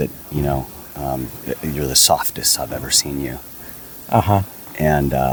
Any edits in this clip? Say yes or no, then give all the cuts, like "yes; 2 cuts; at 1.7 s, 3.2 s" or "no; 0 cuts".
no; 0 cuts